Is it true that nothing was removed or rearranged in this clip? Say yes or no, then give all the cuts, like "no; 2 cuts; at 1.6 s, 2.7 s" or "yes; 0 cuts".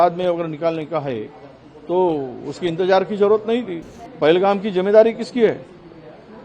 no; 1 cut; at 4.0 s